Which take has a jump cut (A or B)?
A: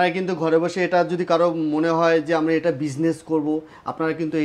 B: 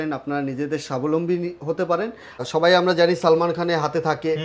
B